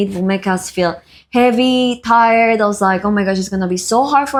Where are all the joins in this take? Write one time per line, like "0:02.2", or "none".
none